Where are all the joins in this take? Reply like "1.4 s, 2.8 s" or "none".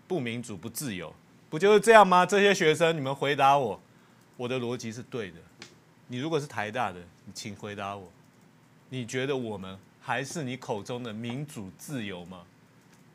none

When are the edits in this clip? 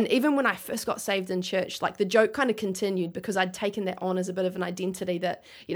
none

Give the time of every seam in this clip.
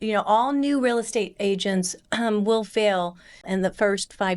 3.5 s

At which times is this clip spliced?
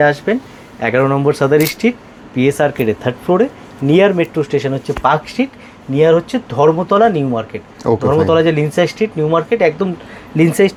none

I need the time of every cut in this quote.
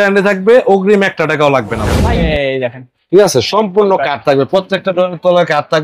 1.9 s

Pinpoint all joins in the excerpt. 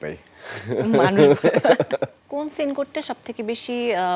2.2 s

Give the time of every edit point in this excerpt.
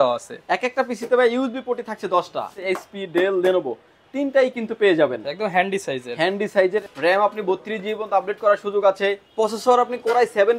2.6 s, 6.8 s, 9.2 s

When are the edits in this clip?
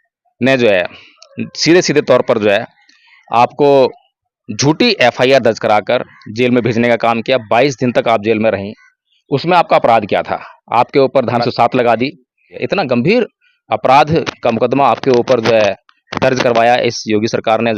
11.4 s, 12.5 s

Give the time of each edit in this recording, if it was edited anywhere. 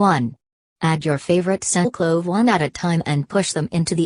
none

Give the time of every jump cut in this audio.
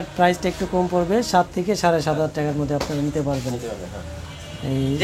none

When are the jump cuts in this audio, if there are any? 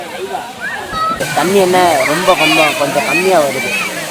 1.3 s

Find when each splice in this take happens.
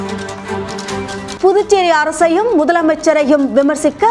1.3 s

